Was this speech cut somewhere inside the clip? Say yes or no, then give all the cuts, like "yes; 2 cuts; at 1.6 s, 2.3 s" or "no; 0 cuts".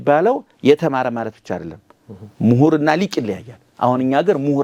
no; 0 cuts